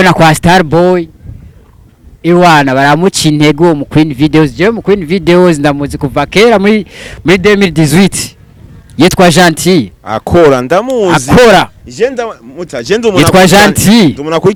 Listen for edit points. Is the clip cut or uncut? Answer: uncut